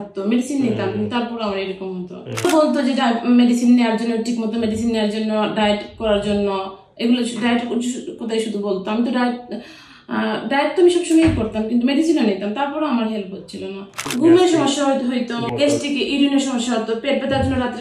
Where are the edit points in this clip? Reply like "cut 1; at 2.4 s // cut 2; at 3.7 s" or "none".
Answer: cut 1; at 2.4 s // cut 2; at 13.9 s